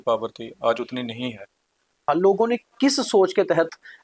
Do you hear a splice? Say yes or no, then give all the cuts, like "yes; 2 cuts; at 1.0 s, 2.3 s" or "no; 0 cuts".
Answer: yes; 1 cut; at 2.1 s